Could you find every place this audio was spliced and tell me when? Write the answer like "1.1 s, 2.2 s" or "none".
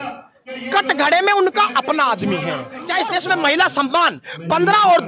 2.8 s